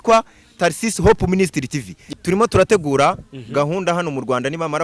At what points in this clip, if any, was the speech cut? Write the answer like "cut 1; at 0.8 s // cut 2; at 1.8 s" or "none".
cut 1; at 2.0 s